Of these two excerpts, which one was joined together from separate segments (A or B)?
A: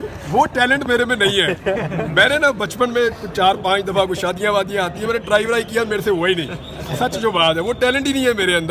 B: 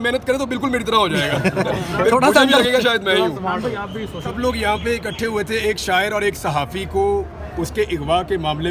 B